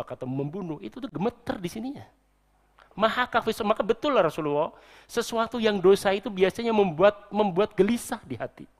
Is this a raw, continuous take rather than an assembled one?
yes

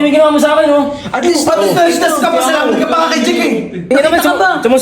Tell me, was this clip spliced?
yes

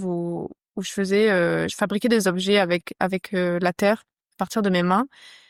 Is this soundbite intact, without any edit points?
yes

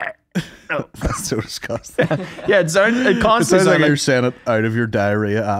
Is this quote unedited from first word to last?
yes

